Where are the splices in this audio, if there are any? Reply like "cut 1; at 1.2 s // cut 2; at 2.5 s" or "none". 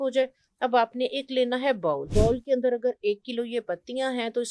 cut 1; at 2.1 s